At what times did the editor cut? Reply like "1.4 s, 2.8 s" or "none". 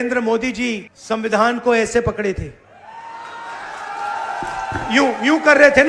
0.9 s